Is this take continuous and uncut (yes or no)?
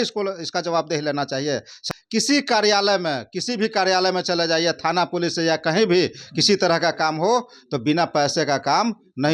no